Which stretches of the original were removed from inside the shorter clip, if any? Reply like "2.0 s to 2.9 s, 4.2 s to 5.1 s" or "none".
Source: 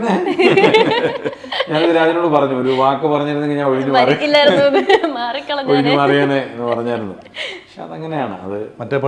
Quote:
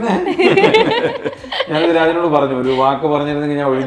none

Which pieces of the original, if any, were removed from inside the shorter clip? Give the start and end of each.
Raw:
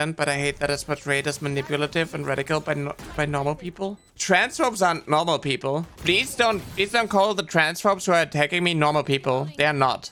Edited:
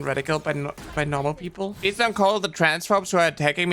4.0 s to 6.7 s

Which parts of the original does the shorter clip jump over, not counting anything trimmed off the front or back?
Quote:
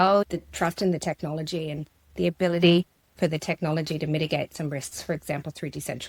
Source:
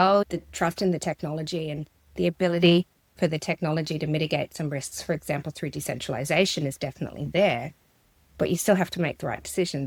none

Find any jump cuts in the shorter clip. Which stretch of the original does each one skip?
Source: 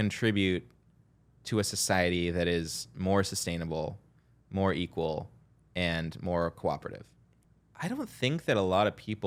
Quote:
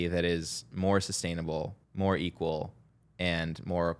4.0 s to 4.4 s

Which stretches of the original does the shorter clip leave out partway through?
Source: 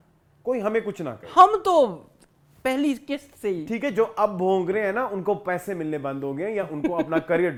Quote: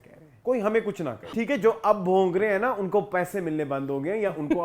1.3 s to 3.6 s

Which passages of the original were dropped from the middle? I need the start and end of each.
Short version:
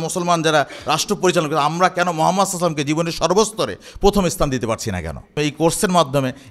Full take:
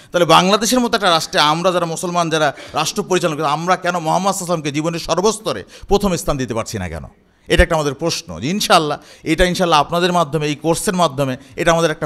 7.3 s to 10.4 s

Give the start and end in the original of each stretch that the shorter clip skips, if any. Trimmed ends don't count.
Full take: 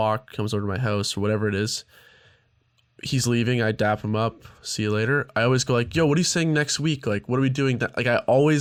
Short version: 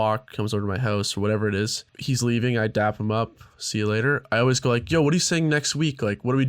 1.9 s to 2.9 s

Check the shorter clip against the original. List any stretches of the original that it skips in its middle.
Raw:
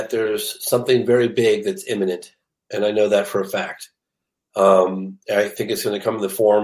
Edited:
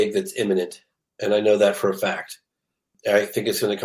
4.4 s to 5.1 s

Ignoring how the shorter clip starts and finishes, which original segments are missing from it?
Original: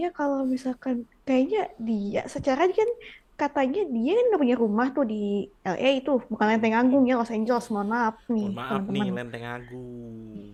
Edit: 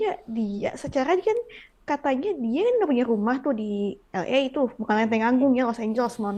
none

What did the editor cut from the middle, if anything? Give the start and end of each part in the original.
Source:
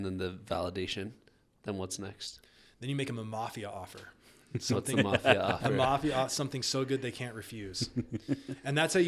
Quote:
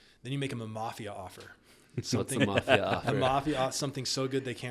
none

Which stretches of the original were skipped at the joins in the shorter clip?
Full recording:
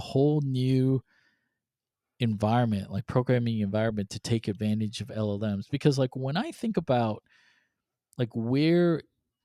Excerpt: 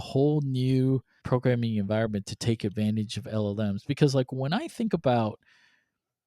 1.1 s to 3.0 s

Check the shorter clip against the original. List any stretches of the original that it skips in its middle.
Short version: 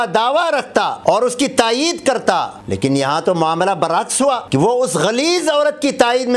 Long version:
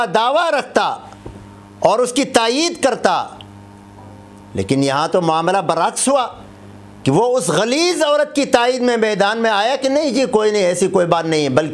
0.9 s to 1.7 s, 3.3 s to 4.4 s, 6.3 s to 7.0 s

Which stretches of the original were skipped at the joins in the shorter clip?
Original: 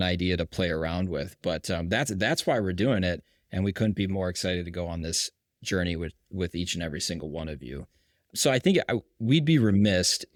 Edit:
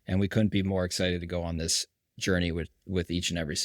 none

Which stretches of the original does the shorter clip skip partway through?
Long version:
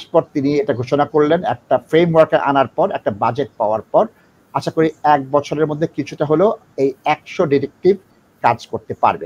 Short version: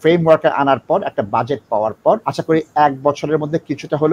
4.1 s to 4.5 s

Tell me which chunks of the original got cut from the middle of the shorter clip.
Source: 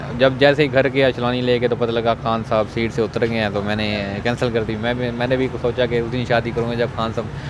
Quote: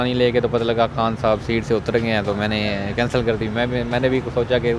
none

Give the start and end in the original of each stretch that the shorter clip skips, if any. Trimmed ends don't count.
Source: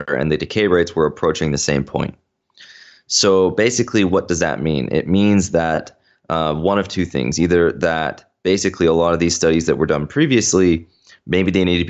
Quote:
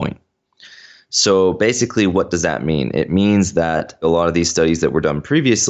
6.0 s to 8.9 s

